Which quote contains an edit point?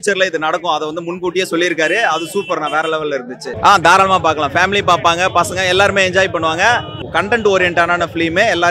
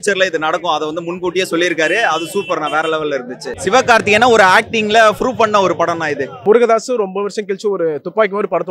second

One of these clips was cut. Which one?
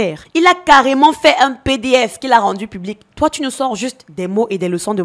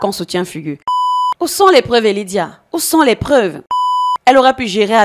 second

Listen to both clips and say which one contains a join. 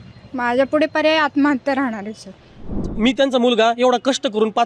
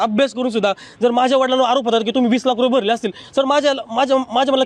first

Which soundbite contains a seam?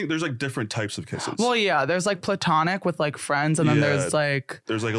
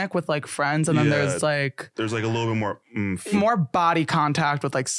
second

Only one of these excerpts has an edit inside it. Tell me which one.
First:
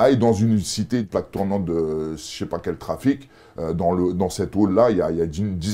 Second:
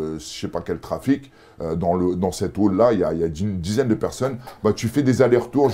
first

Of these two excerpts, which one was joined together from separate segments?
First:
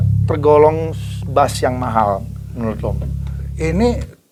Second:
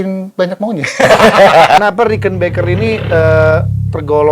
second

